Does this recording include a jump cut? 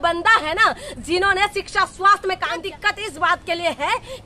yes; 1 cut; at 2.6 s

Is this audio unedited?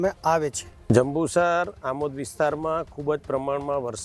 yes; 0 cuts

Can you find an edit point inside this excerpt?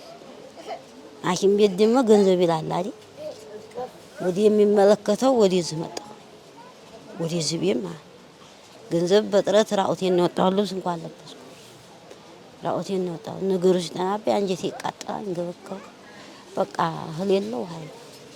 no; 0 cuts

